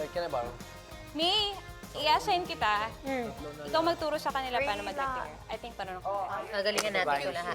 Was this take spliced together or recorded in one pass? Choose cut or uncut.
cut